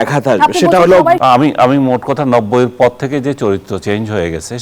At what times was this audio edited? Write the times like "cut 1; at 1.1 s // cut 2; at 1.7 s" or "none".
cut 1; at 1.2 s